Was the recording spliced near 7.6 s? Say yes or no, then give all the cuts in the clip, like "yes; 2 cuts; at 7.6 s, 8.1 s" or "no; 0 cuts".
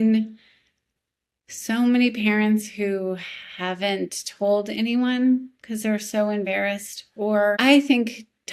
yes; 1 cut; at 7.6 s